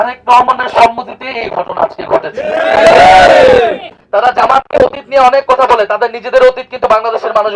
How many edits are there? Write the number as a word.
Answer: one